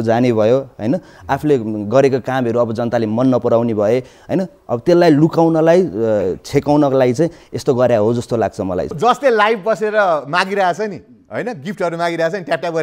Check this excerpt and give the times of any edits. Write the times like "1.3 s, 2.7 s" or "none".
8.9 s